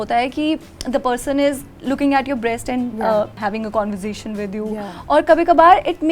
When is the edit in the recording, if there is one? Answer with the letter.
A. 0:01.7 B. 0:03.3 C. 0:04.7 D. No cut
B